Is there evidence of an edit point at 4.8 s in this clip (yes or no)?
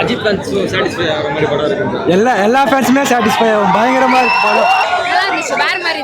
yes